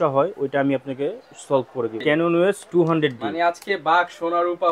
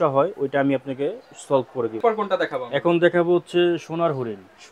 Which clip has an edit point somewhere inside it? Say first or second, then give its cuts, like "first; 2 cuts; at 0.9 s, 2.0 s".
first; 1 cut; at 2.0 s